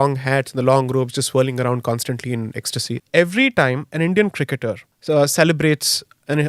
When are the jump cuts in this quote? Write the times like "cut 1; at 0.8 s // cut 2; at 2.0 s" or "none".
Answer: cut 1; at 2.9 s // cut 2; at 4.9 s

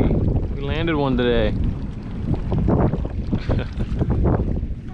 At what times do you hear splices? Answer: none

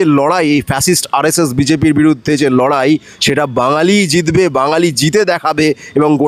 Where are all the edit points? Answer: none

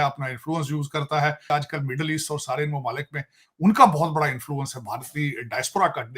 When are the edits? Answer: cut 1; at 1.5 s

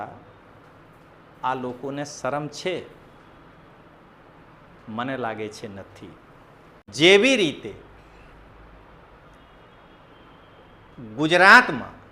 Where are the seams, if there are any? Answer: cut 1; at 6.9 s

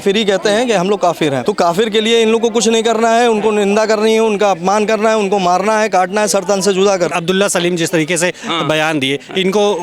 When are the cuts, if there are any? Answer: cut 1; at 1.4 s // cut 2; at 7.1 s

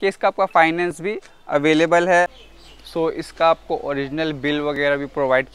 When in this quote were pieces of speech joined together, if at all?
cut 1; at 2.3 s

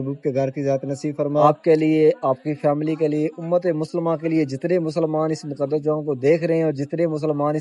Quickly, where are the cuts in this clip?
cut 1; at 1.4 s

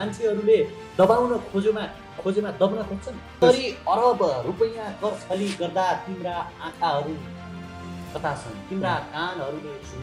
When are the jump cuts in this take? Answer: cut 1; at 3.4 s

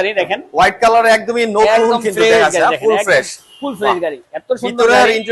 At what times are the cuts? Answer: none

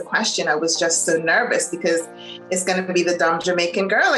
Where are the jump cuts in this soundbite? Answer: none

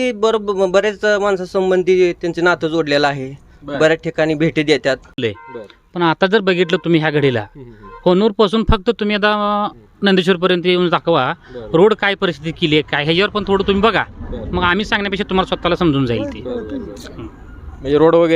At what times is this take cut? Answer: cut 1; at 5.2 s

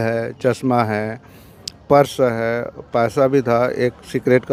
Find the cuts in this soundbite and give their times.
none

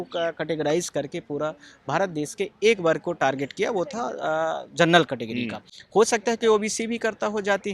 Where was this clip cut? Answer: none

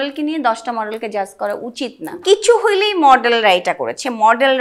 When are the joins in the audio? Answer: cut 1; at 2.1 s

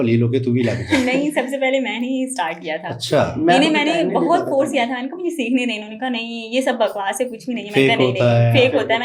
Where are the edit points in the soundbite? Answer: none

